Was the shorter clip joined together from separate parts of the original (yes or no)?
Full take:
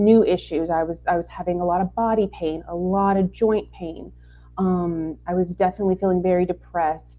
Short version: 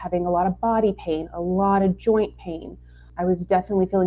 yes